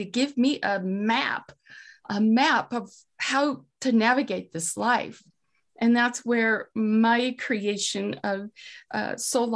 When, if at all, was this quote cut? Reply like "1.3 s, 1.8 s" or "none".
none